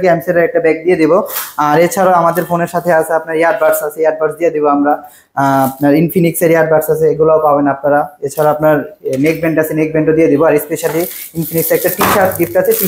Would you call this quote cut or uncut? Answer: uncut